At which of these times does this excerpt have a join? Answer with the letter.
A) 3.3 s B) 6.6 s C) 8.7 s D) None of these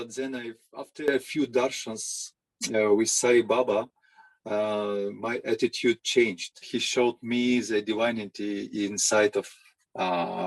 B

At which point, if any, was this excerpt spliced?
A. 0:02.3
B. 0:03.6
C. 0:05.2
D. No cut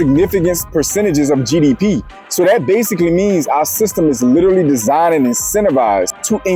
D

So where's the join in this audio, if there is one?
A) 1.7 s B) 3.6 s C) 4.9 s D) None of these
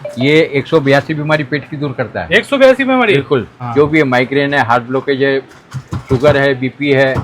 B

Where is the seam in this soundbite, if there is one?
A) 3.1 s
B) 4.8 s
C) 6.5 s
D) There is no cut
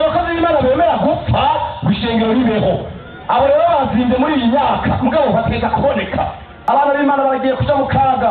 C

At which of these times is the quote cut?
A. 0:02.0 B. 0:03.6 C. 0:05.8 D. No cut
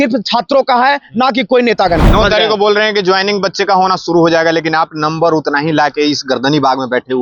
A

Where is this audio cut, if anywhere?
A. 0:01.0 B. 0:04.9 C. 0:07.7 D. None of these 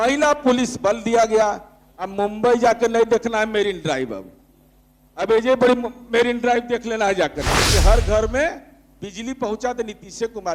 C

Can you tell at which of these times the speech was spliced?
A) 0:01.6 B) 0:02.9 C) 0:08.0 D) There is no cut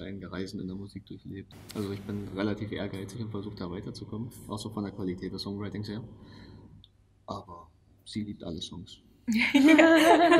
A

